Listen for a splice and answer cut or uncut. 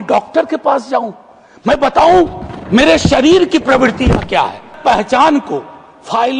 cut